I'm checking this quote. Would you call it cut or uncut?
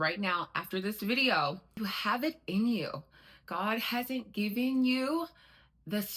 cut